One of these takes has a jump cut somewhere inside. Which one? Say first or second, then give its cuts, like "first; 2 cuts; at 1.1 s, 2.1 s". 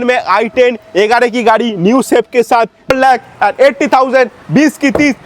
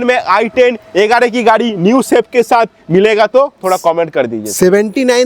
first; 1 cut; at 2.9 s